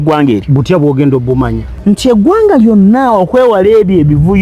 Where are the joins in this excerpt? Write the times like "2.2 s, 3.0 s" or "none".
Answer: 1.7 s